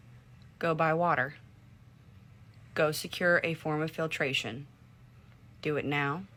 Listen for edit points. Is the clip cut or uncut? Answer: uncut